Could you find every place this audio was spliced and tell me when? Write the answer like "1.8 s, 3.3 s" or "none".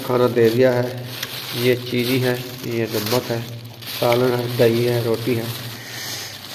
none